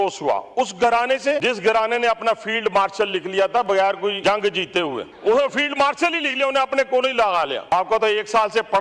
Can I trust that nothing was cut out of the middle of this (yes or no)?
no